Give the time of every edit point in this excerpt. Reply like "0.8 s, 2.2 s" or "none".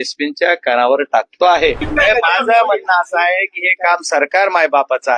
1.9 s